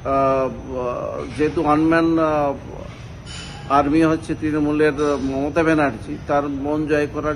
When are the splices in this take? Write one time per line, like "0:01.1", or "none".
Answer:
none